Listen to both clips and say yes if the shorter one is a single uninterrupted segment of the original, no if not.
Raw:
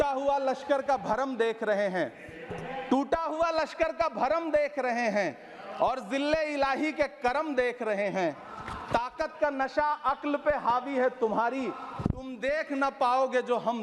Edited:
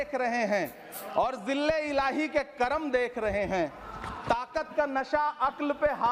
yes